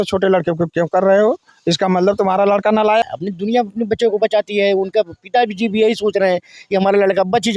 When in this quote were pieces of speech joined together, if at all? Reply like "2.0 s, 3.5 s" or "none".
3.1 s